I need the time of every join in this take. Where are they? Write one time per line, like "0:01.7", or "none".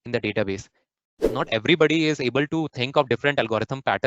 0:01.3